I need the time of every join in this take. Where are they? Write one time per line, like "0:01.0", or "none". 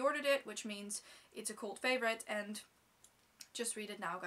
none